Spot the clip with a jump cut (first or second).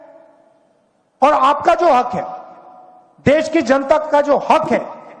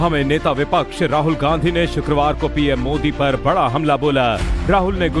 second